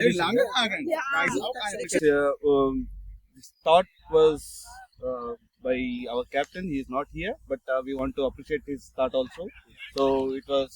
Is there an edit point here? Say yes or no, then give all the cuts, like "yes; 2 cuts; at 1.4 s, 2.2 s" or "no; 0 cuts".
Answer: yes; 1 cut; at 2.0 s